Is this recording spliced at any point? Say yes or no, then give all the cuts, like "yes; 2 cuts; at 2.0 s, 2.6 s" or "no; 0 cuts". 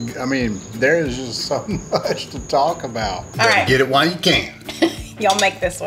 yes; 1 cut; at 3.2 s